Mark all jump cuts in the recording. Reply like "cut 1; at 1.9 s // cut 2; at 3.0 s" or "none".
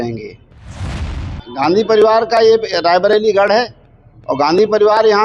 cut 1; at 1.0 s